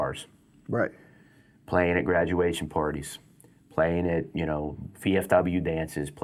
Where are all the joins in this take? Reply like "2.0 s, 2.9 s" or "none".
none